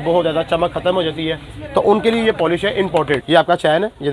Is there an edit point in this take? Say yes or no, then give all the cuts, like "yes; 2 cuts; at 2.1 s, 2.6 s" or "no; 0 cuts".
yes; 1 cut; at 3.2 s